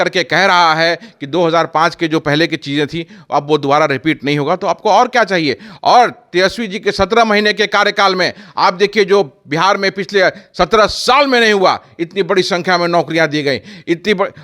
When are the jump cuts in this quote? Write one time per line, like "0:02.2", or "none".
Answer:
none